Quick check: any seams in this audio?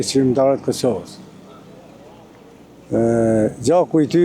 no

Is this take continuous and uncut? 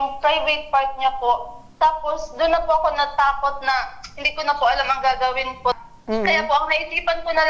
no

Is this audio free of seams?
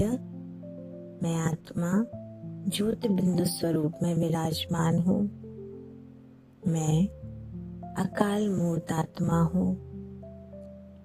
no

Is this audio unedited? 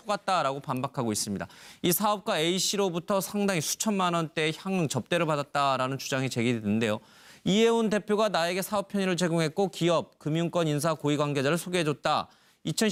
yes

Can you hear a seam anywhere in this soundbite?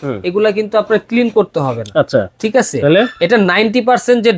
no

